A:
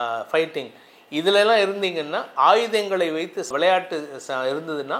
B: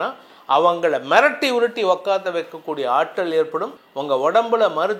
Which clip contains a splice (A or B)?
B